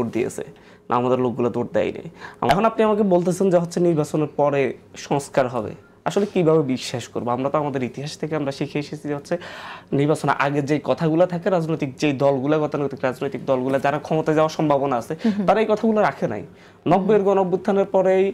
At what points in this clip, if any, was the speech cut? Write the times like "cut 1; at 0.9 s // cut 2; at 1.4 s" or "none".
cut 1; at 2.5 s